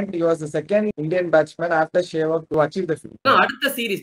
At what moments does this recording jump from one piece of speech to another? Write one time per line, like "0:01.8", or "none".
0:01.0
0:03.2